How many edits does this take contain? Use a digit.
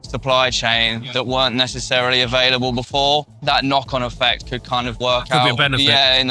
2